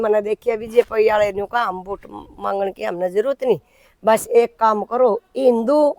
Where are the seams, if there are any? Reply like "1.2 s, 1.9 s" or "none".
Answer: none